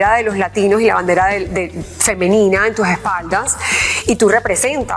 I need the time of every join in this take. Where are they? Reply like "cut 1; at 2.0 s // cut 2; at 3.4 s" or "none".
none